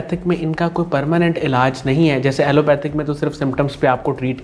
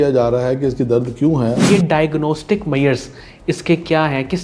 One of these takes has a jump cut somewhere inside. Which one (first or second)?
second